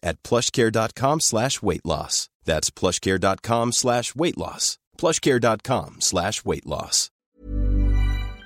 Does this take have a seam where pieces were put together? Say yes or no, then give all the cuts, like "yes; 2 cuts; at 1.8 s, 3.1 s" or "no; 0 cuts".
yes; 1 cut; at 7.0 s